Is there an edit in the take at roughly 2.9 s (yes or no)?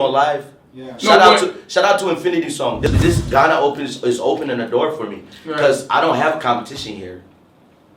yes